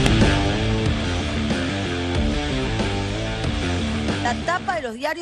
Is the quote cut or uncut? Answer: uncut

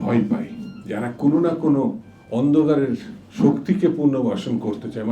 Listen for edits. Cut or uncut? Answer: uncut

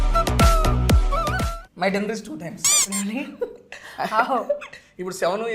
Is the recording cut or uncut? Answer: cut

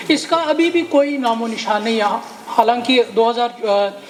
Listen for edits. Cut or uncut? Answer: uncut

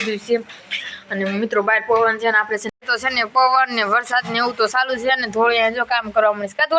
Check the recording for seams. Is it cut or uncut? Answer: cut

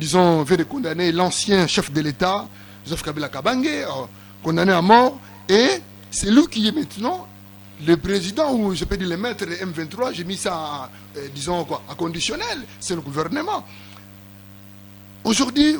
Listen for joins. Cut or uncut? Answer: uncut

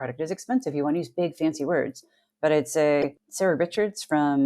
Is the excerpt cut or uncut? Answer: cut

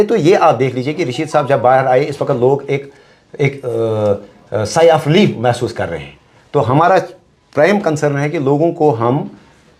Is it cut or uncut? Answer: uncut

